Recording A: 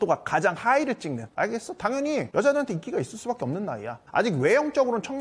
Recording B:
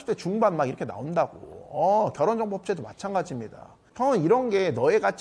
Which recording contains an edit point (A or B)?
A